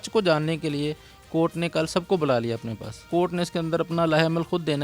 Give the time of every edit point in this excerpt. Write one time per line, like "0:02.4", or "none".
0:03.1